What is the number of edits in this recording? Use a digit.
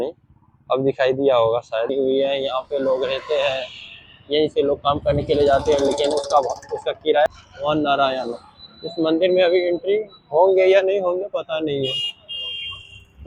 2